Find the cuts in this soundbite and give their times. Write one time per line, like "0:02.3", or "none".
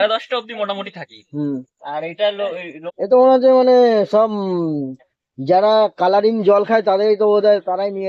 0:02.8